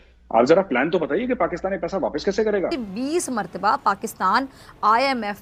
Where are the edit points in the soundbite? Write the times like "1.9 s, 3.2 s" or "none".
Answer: 2.9 s